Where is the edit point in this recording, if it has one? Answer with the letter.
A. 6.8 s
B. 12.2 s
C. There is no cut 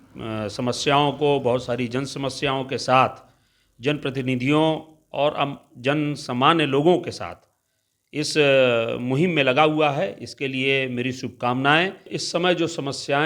B